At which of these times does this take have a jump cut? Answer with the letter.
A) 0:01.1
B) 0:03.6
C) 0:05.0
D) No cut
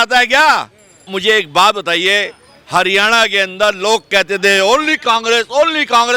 A